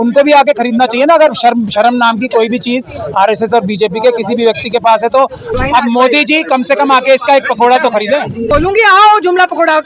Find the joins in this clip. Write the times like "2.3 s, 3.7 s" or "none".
5.4 s, 8.5 s